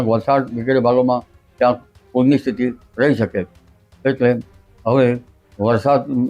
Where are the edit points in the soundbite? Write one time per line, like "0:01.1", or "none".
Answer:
none